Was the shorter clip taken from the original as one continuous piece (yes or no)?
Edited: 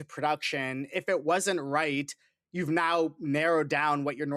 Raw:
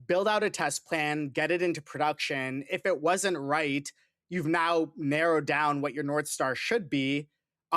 yes